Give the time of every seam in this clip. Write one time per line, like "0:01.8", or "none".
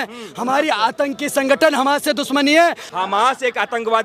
0:02.8